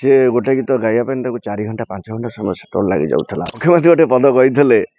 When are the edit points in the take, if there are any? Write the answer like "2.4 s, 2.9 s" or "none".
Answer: 3.6 s

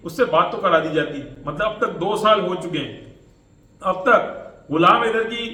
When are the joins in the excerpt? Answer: none

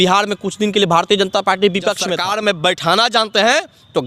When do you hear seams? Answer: 2.1 s

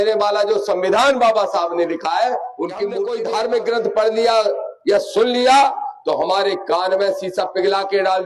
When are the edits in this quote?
3.1 s

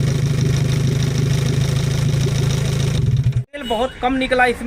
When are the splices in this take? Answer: 3.4 s

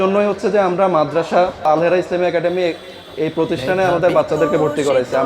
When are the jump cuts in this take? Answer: 1.7 s

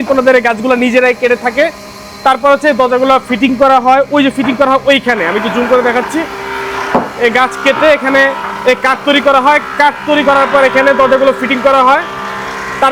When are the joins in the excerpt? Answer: none

